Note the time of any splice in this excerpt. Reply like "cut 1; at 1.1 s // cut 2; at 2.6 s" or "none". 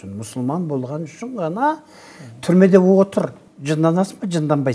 cut 1; at 3.5 s